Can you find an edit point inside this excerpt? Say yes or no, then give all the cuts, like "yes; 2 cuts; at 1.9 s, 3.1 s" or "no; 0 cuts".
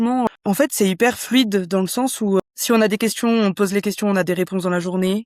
no; 0 cuts